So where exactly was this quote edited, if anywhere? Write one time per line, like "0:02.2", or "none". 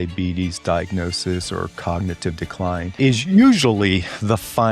0:02.9